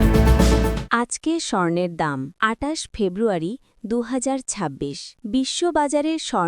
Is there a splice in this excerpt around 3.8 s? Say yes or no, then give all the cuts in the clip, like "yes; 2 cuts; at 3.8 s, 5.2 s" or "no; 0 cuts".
no; 3 cuts; at 0.8 s, 2.3 s, 5.1 s